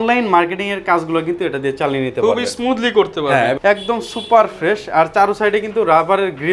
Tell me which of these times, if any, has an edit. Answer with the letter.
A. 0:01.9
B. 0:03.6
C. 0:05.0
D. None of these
B